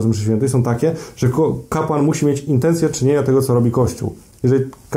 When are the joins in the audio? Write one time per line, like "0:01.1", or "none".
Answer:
none